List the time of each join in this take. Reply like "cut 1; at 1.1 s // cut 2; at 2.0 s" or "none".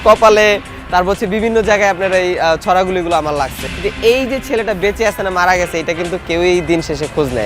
cut 1; at 3.6 s